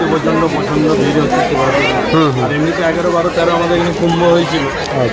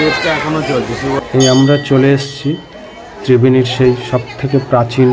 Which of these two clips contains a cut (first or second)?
second